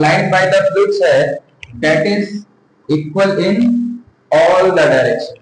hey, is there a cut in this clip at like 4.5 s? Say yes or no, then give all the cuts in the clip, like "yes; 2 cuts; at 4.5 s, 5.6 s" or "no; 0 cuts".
no; 0 cuts